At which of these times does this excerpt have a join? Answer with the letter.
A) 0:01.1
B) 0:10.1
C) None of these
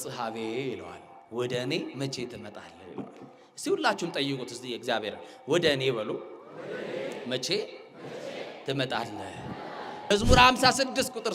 B